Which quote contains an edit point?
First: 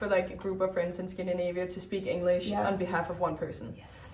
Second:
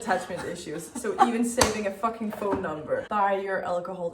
second; 1 cut; at 3.1 s

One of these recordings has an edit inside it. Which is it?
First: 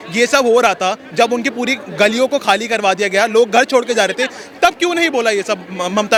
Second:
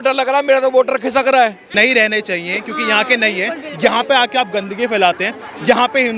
second; 1 cut; at 1.6 s

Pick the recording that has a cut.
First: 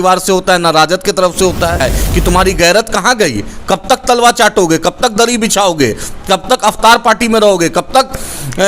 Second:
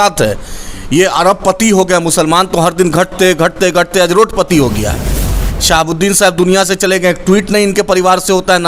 first; 1 cut; at 1.8 s

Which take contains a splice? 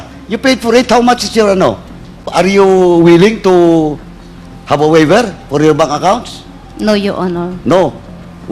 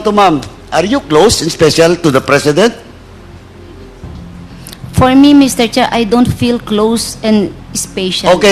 first; 1 cut; at 2.3 s

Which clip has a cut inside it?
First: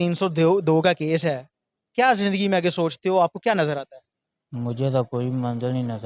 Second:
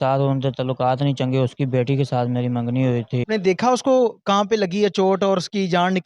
second; 1 cut; at 3.2 s

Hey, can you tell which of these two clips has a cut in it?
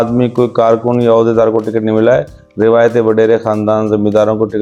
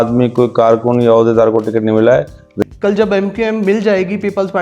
second; 1 cut; at 2.5 s

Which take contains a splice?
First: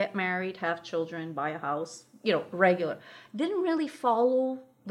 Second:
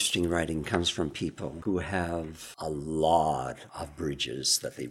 second; 3 cuts; at 1.6 s, 2.4 s, 3.7 s

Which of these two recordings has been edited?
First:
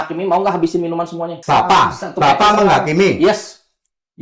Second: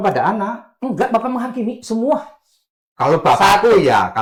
first; 1 cut; at 1.3 s

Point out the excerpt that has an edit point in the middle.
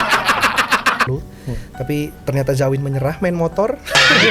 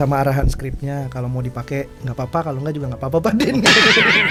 first; 1 cut; at 1.1 s

